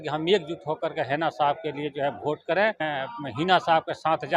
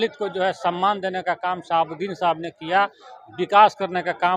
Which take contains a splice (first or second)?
first